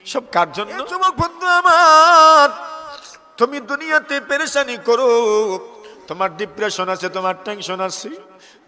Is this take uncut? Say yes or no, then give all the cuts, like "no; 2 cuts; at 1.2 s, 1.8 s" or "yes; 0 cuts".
no; 1 cut; at 1.1 s